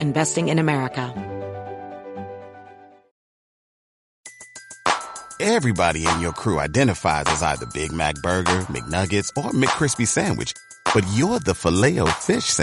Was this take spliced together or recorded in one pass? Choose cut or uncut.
cut